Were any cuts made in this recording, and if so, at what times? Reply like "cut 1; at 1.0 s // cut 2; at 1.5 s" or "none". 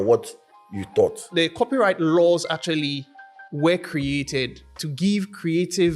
cut 1; at 1.3 s